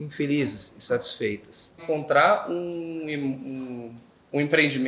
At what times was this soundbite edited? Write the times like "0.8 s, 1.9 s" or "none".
1.8 s

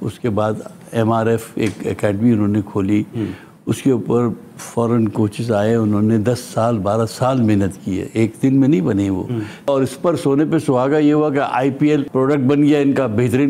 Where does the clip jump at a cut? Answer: 9.7 s, 12.1 s

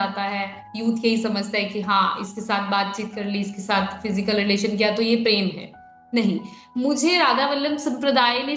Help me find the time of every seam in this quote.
none

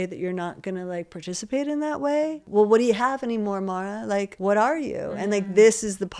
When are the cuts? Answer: 2.5 s, 4.3 s

